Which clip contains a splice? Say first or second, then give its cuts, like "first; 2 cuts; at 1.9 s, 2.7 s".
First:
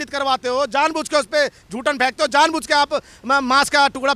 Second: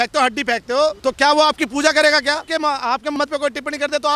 second; 2 cuts; at 1.0 s, 2.5 s